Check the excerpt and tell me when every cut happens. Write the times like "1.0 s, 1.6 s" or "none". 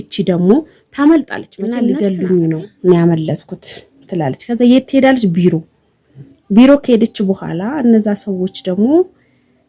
1.8 s